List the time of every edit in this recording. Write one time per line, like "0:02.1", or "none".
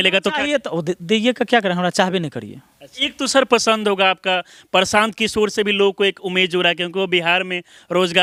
none